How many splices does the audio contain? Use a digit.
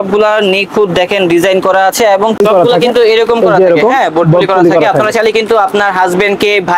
1